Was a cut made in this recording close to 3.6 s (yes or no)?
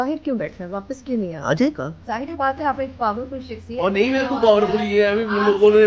no